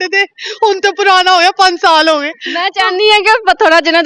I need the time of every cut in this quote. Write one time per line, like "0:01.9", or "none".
none